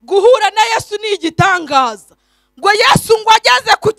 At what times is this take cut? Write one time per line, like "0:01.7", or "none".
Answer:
none